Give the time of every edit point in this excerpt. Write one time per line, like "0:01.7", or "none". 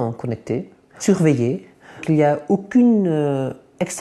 0:01.0
0:02.0